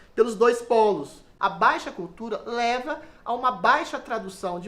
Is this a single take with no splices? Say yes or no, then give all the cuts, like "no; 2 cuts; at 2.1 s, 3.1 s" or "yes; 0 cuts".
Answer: no; 1 cut; at 1.2 s